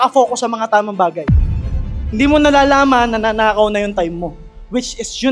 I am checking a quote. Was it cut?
no; 0 cuts

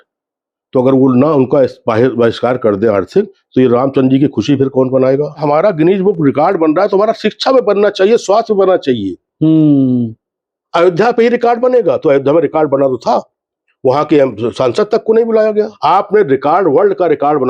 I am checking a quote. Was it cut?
yes; 2 cuts; at 5.4 s, 15.8 s

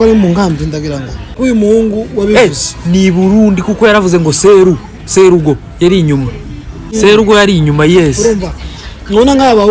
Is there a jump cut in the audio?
yes; 2 cuts; at 1.2 s, 6.9 s

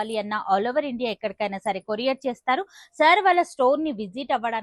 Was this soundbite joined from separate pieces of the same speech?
no; 0 cuts

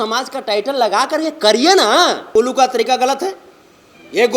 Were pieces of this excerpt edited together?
yes; 1 cut; at 2.3 s

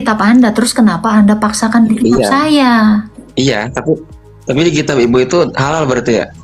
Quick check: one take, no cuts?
yes; 0 cuts

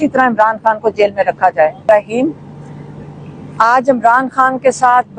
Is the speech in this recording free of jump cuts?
no; 1 cut; at 1.8 s

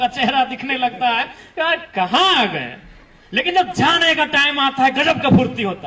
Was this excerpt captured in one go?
yes; 0 cuts

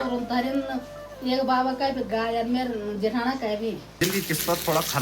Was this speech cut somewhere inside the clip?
yes; 1 cut; at 3.9 s

